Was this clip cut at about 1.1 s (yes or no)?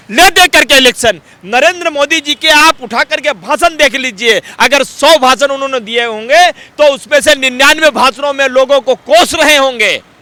no